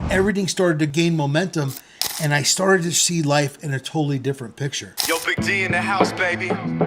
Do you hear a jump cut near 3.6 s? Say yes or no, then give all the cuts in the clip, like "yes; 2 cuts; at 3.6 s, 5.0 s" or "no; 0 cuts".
no; 2 cuts; at 0.9 s, 4.9 s